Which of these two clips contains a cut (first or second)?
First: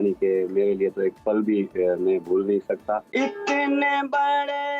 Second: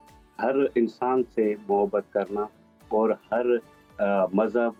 first